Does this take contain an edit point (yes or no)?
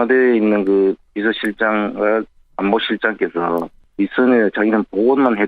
yes